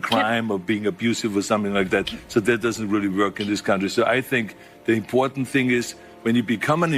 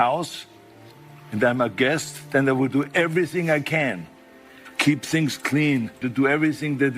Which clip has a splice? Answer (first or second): second